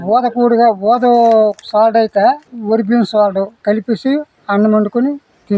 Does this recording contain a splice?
yes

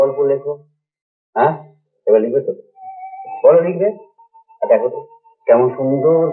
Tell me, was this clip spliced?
no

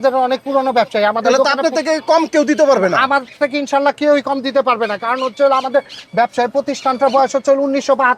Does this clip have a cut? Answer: no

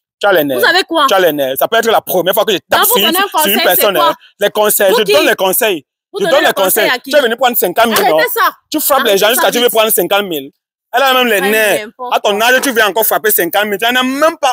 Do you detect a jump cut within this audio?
no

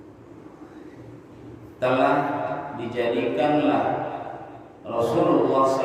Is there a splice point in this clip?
no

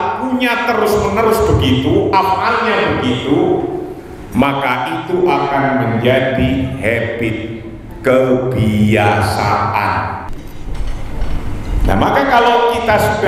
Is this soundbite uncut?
no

